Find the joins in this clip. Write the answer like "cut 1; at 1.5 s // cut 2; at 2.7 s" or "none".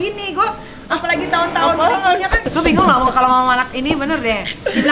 cut 1; at 2.4 s